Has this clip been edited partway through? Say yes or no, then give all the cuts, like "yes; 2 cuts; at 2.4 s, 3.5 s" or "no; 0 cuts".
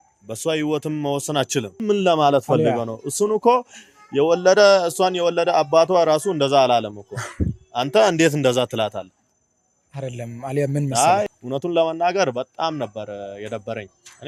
yes; 2 cuts; at 1.8 s, 11.3 s